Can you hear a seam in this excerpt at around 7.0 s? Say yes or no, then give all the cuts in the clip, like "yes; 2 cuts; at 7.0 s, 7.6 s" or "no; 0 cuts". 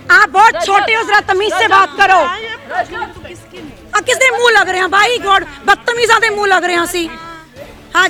no; 0 cuts